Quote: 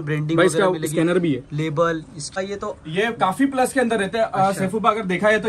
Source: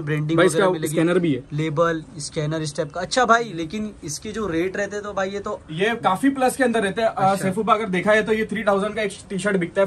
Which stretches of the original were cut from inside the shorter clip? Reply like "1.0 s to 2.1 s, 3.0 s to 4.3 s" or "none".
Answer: 2.3 s to 5.1 s